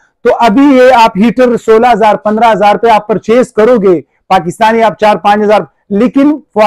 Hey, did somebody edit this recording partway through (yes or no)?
no